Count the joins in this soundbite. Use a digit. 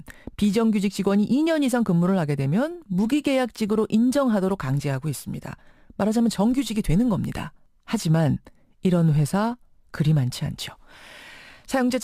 0